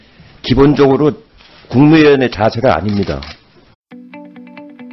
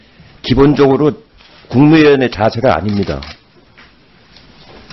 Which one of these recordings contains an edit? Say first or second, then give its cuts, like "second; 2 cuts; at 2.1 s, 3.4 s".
second; 1 cut; at 3.8 s